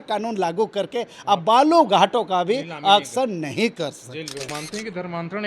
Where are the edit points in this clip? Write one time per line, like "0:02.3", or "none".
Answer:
0:04.5